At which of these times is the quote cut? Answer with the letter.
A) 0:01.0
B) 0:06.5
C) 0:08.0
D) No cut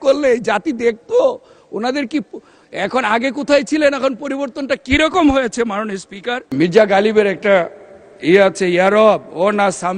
B